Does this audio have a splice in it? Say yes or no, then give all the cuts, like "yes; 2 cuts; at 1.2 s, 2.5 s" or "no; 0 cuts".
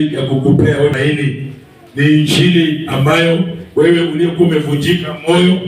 yes; 1 cut; at 0.9 s